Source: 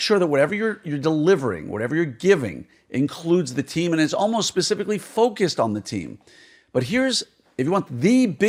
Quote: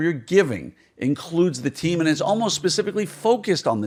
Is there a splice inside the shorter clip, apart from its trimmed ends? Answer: no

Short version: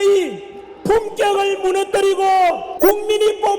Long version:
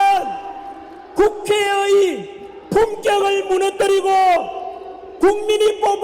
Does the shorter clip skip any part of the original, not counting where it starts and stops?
yes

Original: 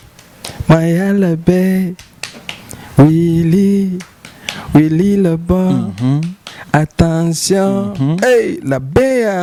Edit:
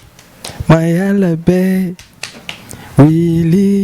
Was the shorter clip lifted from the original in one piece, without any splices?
yes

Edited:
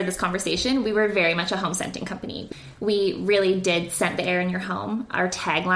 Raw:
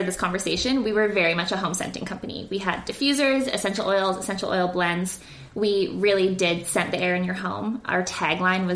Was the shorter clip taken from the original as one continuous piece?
no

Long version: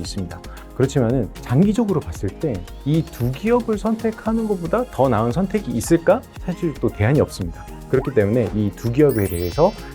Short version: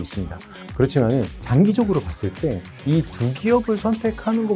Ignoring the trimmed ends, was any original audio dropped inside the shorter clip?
no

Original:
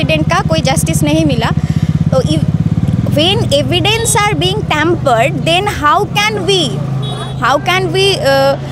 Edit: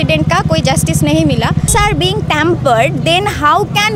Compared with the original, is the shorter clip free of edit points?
no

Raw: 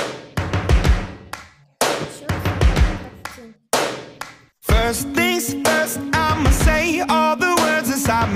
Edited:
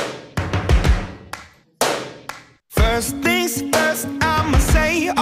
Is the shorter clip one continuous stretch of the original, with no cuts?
no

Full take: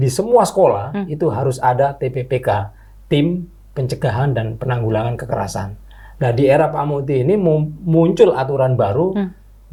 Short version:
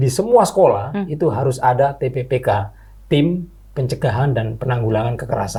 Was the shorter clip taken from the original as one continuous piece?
yes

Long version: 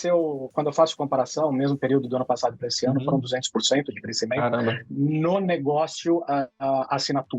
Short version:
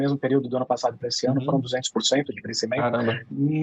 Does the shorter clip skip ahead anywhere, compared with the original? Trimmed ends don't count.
no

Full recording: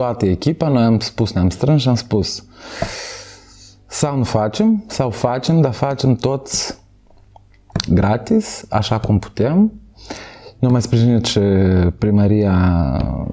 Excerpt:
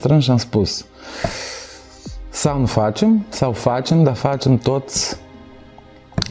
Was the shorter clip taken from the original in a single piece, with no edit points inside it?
yes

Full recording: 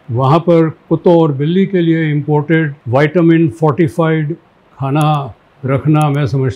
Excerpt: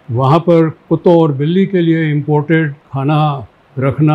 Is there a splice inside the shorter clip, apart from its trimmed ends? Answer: yes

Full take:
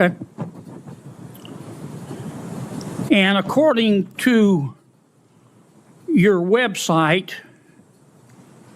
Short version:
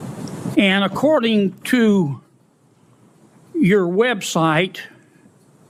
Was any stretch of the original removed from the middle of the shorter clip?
no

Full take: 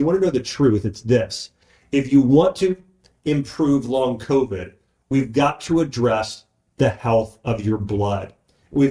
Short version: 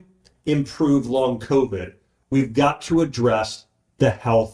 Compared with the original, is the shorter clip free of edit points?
yes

